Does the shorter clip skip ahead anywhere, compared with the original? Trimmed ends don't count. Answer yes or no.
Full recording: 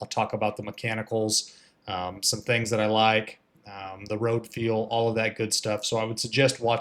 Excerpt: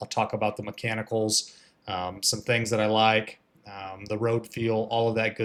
no